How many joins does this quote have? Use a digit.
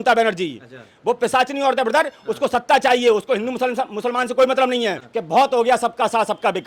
1